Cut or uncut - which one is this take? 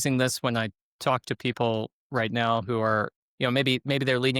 cut